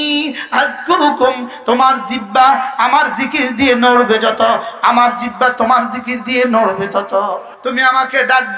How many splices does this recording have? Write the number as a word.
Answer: one